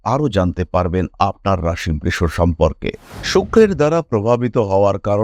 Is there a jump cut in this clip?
yes; 1 cut; at 3.1 s

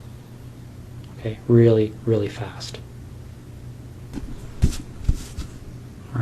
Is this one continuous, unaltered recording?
no; 1 cut; at 4.1 s

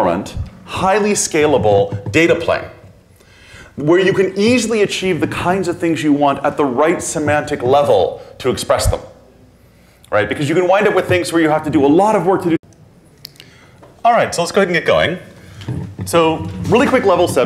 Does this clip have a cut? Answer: no; 0 cuts

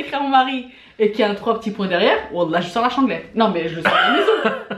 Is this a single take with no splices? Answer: yes; 0 cuts

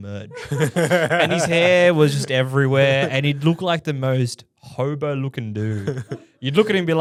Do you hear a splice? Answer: no; 0 cuts

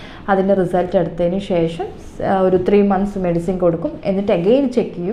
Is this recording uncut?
yes; 0 cuts

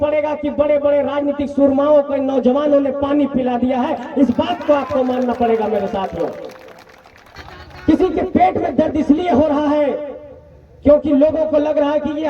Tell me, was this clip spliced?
yes; 1 cut; at 7.4 s

